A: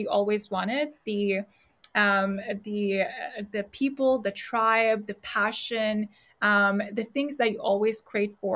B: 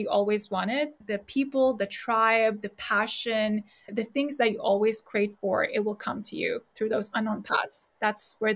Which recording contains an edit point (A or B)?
B